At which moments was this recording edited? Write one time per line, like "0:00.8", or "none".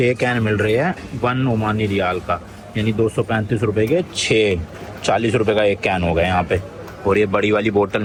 none